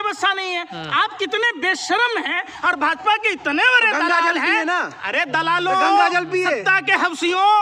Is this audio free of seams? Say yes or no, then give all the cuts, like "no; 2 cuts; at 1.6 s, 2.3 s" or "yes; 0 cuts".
yes; 0 cuts